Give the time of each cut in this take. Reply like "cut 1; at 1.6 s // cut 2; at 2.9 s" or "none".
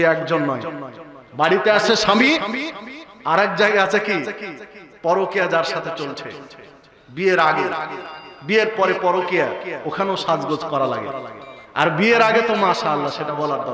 none